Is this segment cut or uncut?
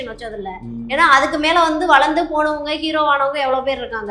uncut